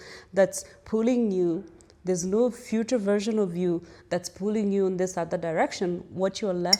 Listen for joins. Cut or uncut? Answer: uncut